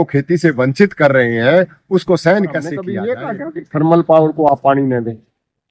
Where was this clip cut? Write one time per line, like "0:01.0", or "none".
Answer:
0:02.9